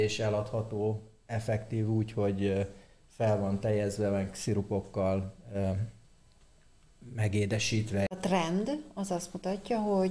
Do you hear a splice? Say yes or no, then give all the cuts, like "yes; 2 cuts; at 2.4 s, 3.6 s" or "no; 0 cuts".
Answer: yes; 1 cut; at 8.1 s